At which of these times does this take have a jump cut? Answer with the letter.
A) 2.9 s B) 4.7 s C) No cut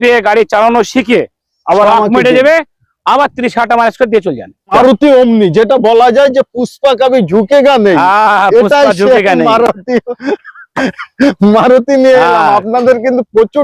B